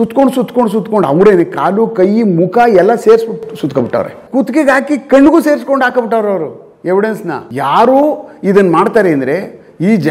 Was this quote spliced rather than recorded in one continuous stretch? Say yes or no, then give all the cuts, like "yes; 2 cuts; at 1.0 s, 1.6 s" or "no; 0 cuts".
yes; 2 cuts; at 4.2 s, 7.5 s